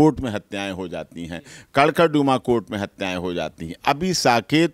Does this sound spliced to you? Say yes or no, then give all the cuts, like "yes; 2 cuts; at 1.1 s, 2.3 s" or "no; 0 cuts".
no; 0 cuts